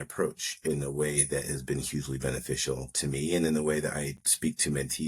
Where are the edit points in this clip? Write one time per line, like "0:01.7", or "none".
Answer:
none